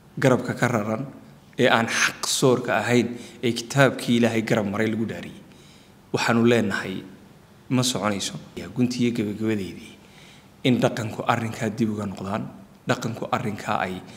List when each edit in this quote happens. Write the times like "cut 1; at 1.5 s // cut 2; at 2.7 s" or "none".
cut 1; at 8.6 s

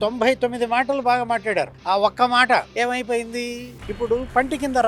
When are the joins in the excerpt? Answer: cut 1; at 3.7 s

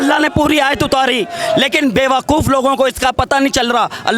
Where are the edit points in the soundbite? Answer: none

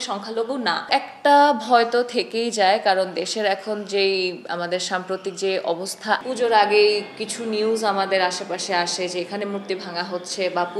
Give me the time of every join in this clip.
cut 1; at 0.9 s // cut 2; at 6.2 s

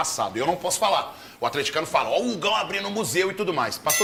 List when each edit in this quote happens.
none

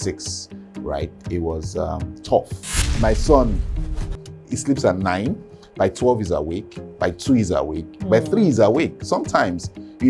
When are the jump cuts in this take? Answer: cut 1; at 2.9 s

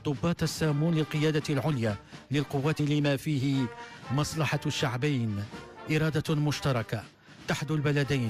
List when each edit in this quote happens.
none

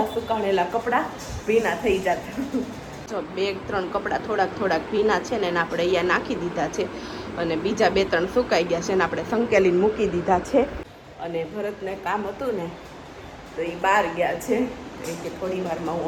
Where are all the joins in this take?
none

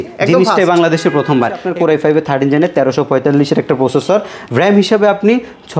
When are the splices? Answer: cut 1; at 1.7 s

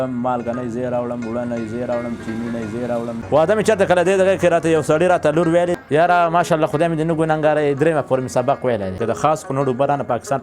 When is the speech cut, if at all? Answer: cut 1; at 3.2 s // cut 2; at 5.7 s // cut 3; at 9.0 s

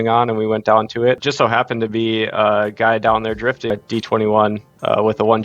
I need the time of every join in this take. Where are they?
cut 1; at 1.2 s // cut 2; at 3.7 s

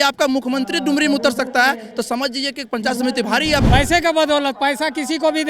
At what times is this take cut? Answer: cut 1; at 3.6 s

